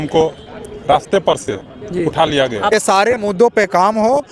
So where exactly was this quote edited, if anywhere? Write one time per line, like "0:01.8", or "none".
0:02.7